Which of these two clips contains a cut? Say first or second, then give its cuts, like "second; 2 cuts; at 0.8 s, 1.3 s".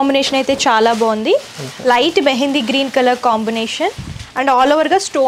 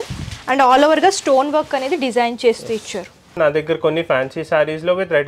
second; 1 cut; at 3.4 s